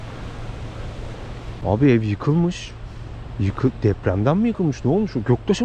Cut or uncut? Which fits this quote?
cut